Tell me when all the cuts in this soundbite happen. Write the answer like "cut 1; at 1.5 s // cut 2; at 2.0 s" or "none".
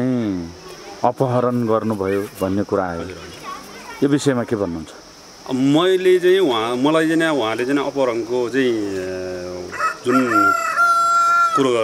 none